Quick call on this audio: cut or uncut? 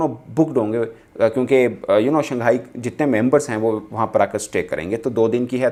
uncut